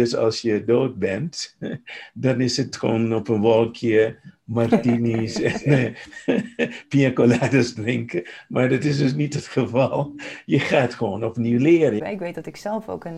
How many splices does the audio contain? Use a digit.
1